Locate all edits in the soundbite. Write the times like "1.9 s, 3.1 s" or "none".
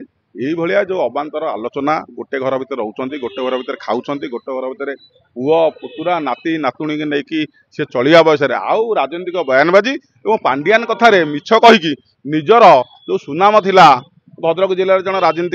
none